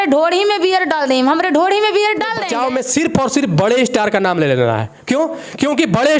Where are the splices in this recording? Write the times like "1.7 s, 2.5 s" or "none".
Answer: 2.4 s